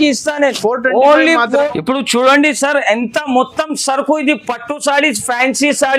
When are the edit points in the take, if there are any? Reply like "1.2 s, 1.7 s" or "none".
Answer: 1.6 s

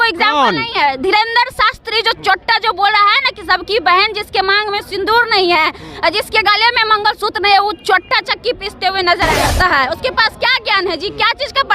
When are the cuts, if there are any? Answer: 9.4 s

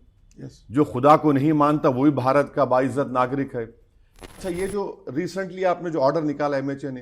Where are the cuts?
4.3 s

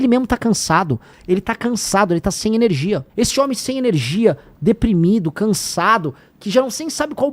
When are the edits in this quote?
1.1 s, 3.1 s

